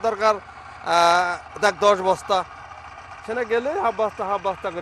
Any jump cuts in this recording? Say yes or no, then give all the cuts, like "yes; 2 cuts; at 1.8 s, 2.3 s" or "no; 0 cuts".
no; 0 cuts